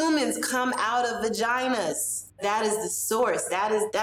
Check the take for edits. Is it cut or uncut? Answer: uncut